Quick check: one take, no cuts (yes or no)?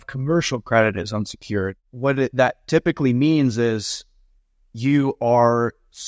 no